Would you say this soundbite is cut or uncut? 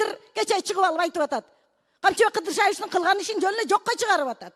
uncut